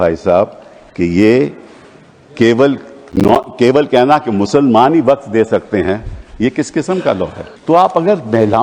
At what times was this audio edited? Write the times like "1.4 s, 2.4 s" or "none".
7.5 s